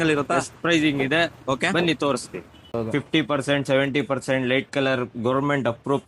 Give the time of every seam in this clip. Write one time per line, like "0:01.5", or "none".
0:02.7